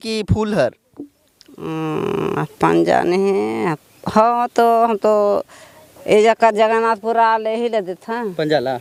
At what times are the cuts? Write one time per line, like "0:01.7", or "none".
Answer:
none